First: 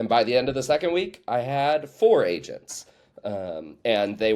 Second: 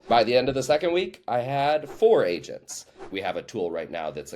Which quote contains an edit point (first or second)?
second